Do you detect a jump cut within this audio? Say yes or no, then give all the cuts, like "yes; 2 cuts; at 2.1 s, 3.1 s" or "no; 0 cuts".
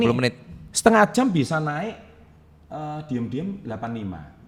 no; 0 cuts